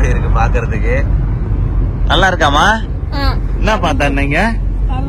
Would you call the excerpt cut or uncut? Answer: uncut